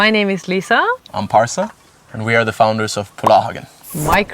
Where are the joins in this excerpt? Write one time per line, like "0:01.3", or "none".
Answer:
none